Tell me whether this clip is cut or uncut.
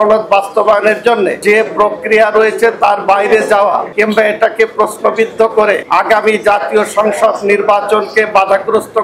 cut